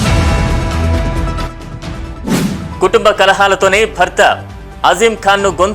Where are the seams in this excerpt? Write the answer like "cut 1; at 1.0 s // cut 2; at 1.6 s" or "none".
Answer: cut 1; at 1.7 s // cut 2; at 2.8 s